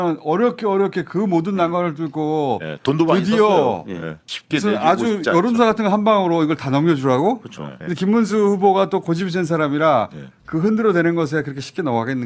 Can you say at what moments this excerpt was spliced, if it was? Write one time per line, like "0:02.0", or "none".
0:04.2
0:07.7